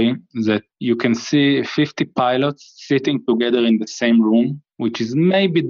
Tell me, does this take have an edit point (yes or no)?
no